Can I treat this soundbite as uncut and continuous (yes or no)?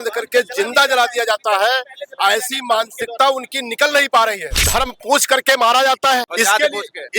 no